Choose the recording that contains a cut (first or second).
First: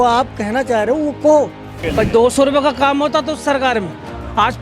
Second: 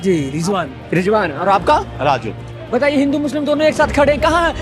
first